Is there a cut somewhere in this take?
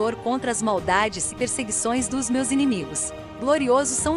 yes; 1 cut; at 3.2 s

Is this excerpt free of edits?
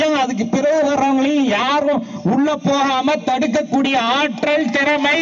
yes; 0 cuts

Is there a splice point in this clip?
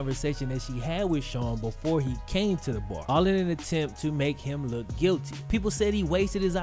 yes; 1 cut; at 5.4 s

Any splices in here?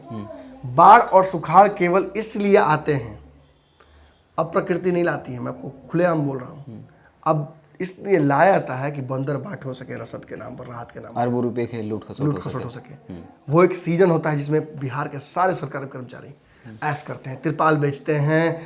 no; 0 cuts

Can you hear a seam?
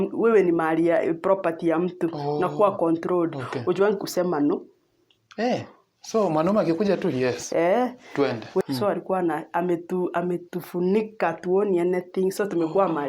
yes; 1 cut; at 8.6 s

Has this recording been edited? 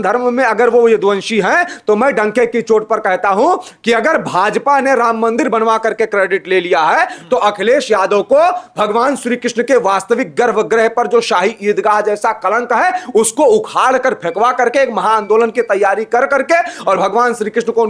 no; 0 cuts

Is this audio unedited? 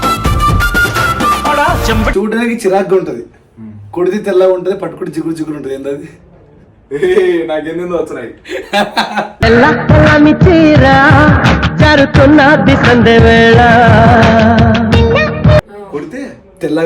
no; 2 cuts; at 2.1 s, 15.7 s

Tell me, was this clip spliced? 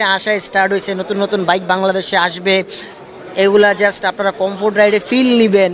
no; 0 cuts

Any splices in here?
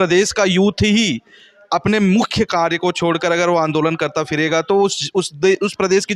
no; 0 cuts

